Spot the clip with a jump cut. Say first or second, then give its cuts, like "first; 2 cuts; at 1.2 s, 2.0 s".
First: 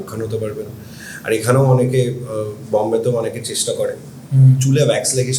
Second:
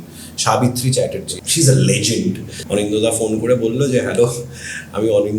second; 2 cuts; at 1.3 s, 2.5 s